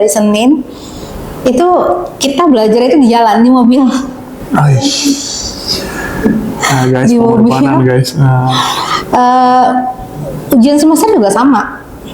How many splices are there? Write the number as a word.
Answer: zero